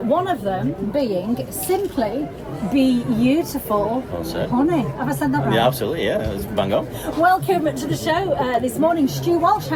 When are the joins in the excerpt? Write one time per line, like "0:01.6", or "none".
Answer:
none

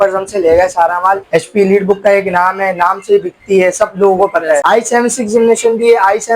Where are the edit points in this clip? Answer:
0:01.2
0:04.6

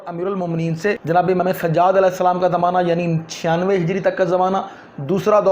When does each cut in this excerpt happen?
0:01.0

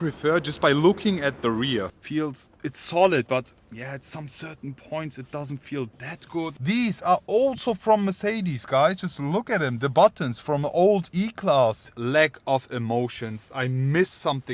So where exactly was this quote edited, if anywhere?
0:01.9
0:06.6
0:11.8

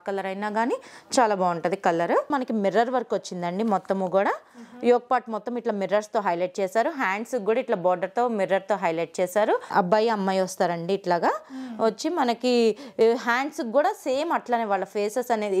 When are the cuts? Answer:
0:02.3
0:09.7

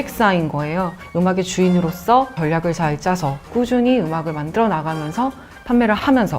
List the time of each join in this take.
0:01.0

